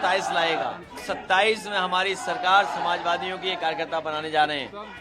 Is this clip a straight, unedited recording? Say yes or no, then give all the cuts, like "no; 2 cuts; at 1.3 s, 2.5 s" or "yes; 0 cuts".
no; 1 cut; at 1.0 s